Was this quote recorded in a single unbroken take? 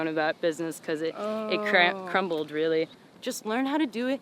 no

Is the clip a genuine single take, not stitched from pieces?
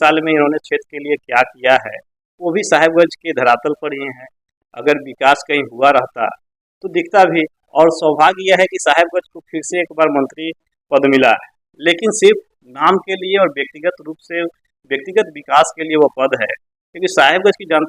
no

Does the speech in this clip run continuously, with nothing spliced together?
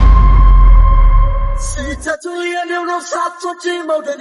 no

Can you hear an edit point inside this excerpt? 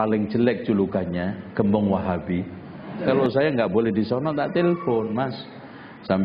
yes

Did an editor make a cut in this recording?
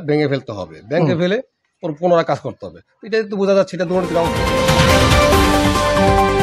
yes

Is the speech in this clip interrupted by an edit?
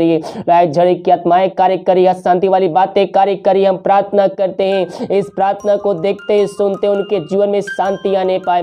no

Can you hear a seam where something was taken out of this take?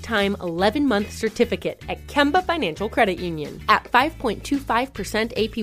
no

